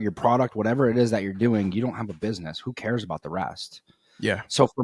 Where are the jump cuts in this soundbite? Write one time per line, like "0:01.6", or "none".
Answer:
none